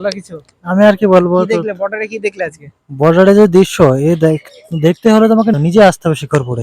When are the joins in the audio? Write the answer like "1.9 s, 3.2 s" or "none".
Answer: 5.5 s